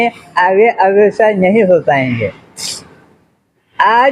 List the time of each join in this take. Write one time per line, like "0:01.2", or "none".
none